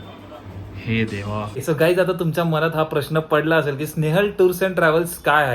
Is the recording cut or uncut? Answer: cut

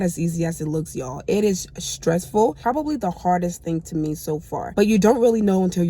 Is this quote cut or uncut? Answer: cut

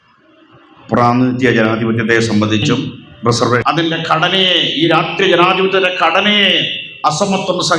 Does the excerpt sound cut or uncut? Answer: cut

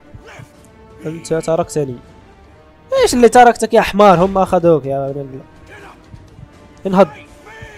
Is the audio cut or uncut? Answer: uncut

